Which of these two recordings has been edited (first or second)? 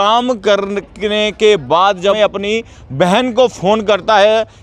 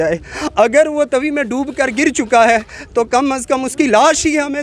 first